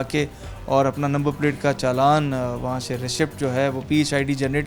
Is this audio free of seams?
yes; 0 cuts

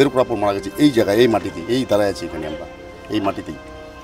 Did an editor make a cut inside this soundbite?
no; 0 cuts

